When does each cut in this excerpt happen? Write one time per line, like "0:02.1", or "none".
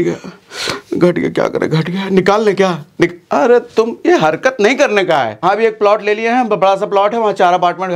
0:05.4